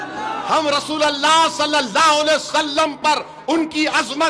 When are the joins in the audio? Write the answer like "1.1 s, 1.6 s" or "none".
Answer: none